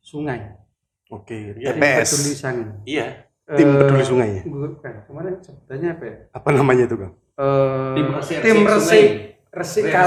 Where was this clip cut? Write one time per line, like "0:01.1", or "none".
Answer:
none